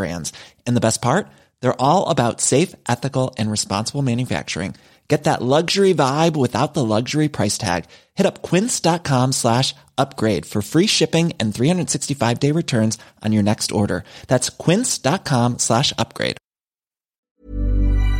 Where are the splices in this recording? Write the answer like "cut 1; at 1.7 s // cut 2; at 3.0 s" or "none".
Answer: cut 1; at 17.2 s